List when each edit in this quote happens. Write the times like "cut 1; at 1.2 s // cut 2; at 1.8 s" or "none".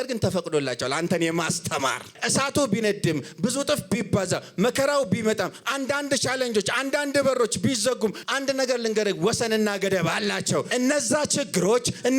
cut 1; at 2.2 s // cut 2; at 8.2 s // cut 3; at 10.7 s